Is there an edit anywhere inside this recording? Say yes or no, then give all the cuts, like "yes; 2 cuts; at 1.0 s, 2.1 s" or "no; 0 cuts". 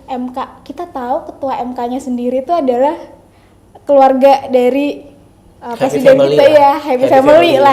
no; 0 cuts